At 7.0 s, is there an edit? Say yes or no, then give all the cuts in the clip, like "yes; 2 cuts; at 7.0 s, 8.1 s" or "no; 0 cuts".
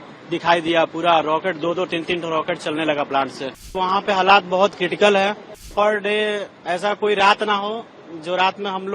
no; 2 cuts; at 3.8 s, 5.6 s